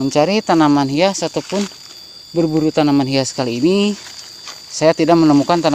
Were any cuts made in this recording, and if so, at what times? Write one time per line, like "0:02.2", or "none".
none